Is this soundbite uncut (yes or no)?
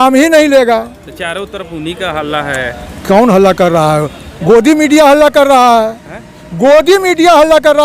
yes